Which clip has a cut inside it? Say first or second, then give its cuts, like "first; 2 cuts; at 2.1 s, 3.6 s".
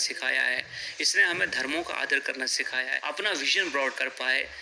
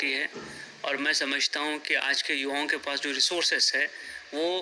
first; 1 cut; at 2.9 s